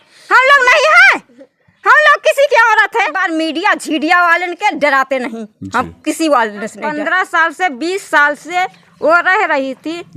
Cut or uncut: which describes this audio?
cut